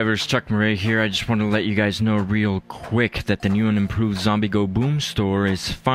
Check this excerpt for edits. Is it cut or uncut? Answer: uncut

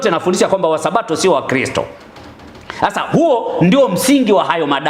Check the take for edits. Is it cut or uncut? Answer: uncut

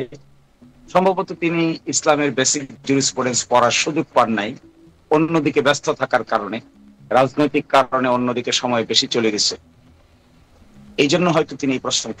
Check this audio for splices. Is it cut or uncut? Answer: uncut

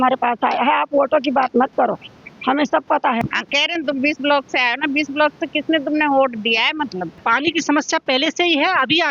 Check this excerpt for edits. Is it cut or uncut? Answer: cut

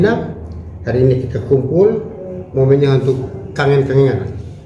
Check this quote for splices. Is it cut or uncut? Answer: uncut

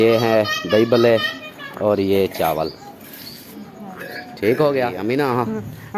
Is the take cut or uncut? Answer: cut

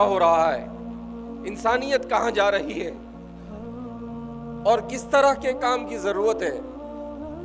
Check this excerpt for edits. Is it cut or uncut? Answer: cut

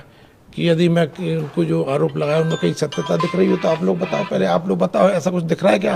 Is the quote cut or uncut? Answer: uncut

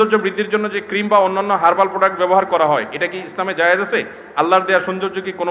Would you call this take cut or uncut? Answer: uncut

